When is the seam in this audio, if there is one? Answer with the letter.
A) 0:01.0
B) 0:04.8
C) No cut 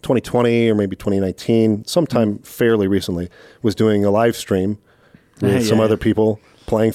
C